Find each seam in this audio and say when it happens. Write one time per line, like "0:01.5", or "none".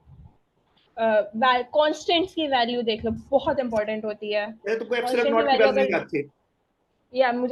none